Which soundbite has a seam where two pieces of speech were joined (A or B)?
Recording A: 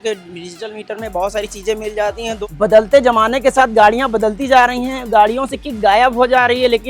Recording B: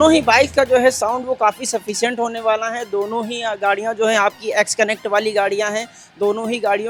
A